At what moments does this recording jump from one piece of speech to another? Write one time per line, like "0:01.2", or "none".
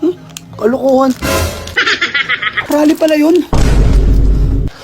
0:02.6